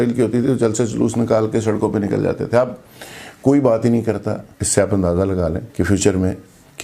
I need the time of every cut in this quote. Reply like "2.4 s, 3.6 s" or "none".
4.5 s, 5.6 s